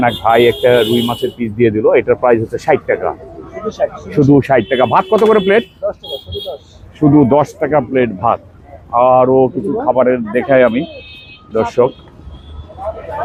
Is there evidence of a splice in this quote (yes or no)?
no